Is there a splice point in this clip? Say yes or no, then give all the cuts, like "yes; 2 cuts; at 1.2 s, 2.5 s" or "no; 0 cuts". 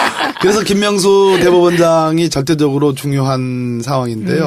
no; 0 cuts